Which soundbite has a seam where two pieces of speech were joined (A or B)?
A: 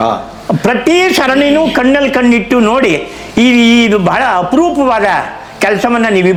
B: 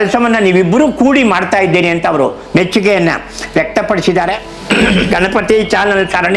B